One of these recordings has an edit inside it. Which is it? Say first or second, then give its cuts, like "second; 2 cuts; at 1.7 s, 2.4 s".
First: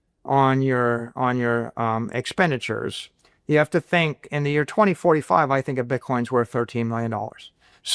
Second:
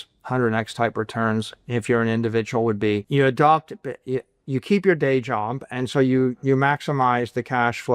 second; 1 cut; at 3.0 s